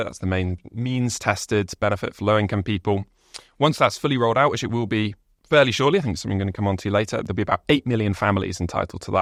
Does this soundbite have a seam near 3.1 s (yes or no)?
no